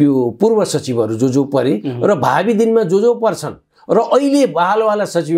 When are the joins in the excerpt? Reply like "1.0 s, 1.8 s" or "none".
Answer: none